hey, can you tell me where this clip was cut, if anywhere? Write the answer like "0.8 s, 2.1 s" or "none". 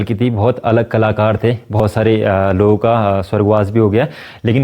1.8 s